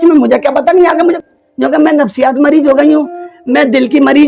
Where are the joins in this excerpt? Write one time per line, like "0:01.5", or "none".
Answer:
0:01.2